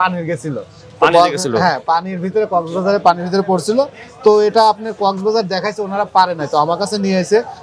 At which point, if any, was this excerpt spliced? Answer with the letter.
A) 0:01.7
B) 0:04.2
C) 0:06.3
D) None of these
D